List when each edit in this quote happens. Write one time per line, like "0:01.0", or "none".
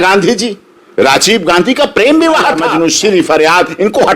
0:02.7